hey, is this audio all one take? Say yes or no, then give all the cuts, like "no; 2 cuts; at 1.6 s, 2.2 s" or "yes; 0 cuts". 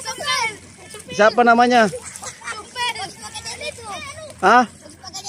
yes; 0 cuts